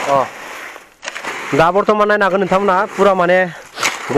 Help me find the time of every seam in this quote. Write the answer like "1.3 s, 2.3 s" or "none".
1.3 s